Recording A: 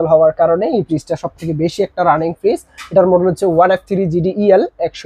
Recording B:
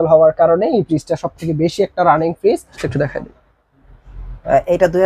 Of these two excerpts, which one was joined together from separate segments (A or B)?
B